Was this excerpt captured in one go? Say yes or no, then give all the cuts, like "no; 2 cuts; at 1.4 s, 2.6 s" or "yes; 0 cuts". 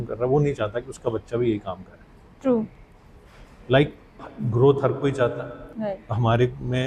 yes; 0 cuts